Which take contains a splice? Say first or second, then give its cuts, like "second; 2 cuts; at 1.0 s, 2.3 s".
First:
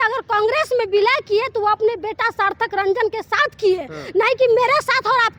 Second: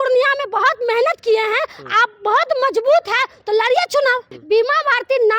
second; 1 cut; at 4.3 s